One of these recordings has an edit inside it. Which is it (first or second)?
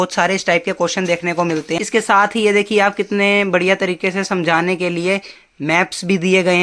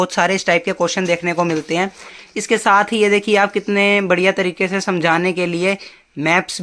first